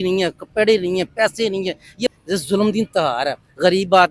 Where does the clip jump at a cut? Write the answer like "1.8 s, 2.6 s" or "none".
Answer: 2.2 s